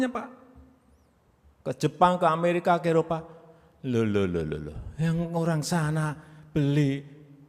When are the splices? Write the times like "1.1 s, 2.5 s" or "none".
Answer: none

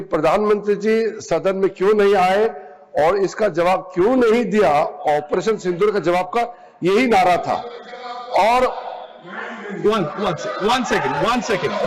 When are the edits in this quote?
none

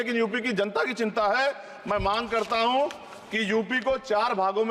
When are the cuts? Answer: none

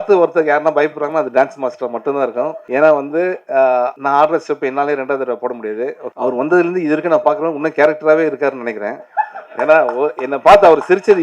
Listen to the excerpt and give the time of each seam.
2.6 s, 4.0 s, 6.0 s

